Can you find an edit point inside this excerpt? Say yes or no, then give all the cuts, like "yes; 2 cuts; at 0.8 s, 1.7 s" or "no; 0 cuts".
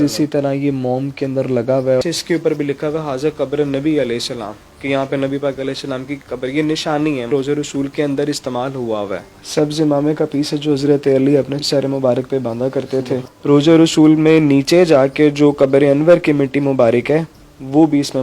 yes; 5 cuts; at 2.0 s, 7.3 s, 9.2 s, 11.6 s, 13.3 s